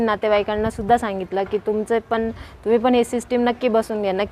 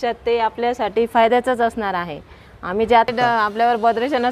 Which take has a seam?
second; 1 cut; at 3.1 s

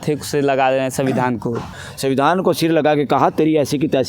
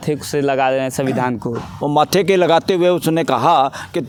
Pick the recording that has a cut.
first; 1 cut; at 1.7 s

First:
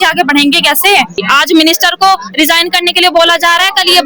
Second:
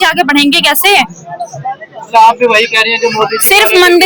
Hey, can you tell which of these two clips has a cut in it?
first; 1 cut; at 1.2 s

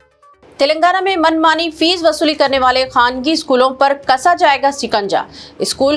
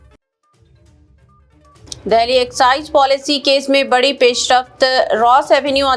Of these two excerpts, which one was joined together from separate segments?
second; 1 cut; at 1.9 s

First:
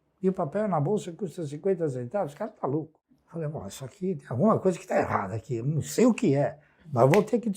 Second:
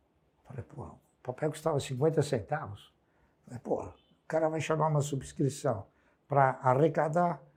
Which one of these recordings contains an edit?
first; 1 cut; at 3.0 s

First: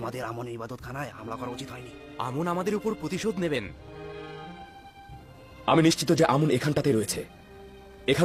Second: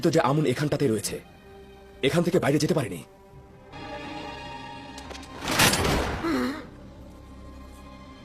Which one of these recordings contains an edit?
second; 1 cut; at 3.7 s

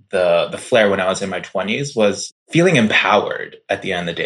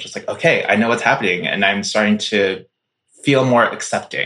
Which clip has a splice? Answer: first; 1 cut; at 2.3 s

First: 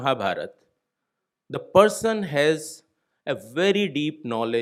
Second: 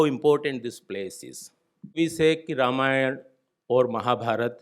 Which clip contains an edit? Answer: second; 1 cut; at 1.9 s

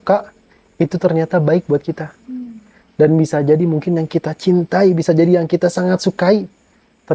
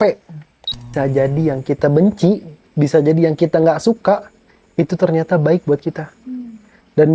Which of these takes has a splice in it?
second; 1 cut; at 0.9 s

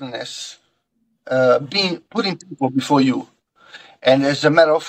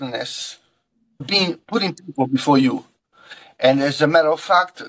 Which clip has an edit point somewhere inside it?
second; 1 cut; at 1.2 s

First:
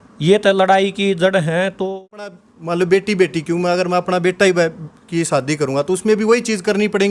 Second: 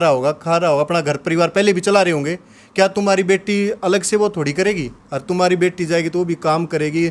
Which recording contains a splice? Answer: first; 1 cut; at 2.4 s

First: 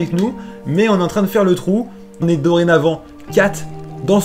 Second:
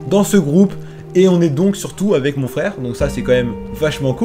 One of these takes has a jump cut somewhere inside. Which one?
first; 1 cut; at 2.1 s

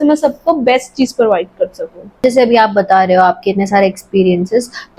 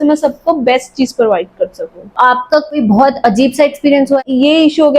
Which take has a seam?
second; 2 cuts; at 2.2 s, 4.2 s

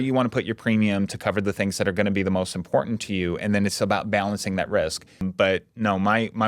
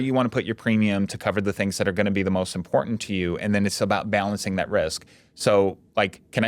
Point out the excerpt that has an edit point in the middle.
first; 1 cut; at 5.3 s

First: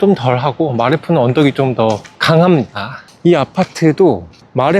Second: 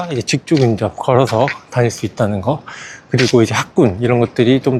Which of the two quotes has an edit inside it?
first; 1 cut; at 3.0 s

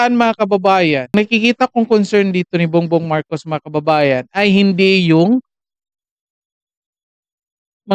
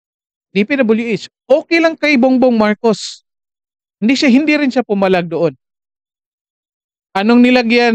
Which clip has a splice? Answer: first; 1 cut; at 1.1 s

